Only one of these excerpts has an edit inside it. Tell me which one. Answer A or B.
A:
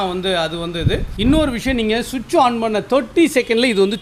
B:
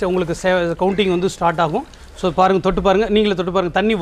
A